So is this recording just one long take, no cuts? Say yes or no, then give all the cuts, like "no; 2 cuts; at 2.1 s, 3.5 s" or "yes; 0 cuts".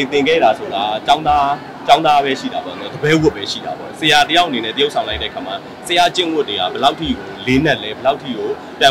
yes; 0 cuts